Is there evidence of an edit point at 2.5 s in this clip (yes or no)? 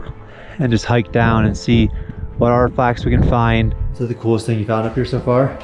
no